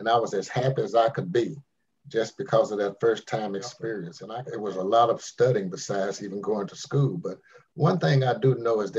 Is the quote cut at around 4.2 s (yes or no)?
yes